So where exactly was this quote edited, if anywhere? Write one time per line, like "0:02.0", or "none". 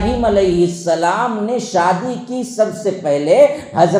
none